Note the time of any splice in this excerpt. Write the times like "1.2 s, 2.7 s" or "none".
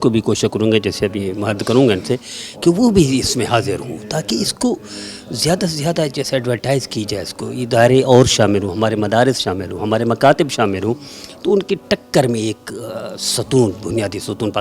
none